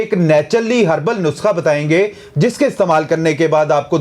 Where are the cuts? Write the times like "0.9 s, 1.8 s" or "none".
none